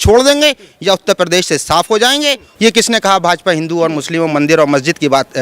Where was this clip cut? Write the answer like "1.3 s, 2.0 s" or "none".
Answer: 2.5 s